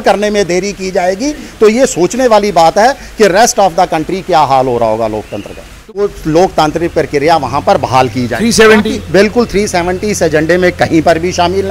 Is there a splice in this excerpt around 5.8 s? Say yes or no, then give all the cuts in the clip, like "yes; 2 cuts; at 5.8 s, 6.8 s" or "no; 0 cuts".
yes; 1 cut; at 5.8 s